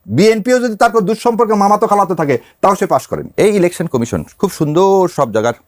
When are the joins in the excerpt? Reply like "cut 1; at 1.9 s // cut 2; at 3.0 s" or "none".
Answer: cut 1; at 3.2 s